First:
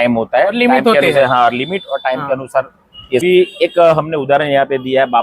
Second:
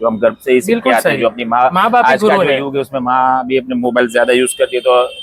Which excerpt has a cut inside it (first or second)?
first